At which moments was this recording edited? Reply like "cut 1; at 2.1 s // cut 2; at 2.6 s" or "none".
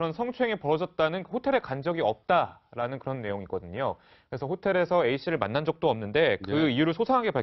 cut 1; at 4.6 s